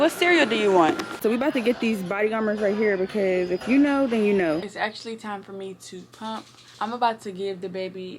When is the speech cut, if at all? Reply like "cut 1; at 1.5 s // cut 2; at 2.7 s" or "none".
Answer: cut 1; at 1.1 s // cut 2; at 4.7 s // cut 3; at 6.6 s